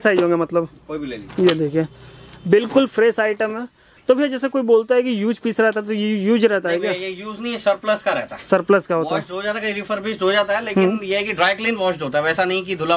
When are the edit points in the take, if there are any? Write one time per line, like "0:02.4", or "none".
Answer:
none